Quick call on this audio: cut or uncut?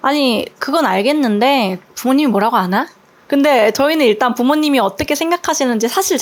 uncut